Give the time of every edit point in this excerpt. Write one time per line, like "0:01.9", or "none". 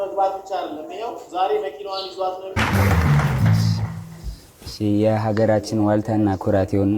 0:02.6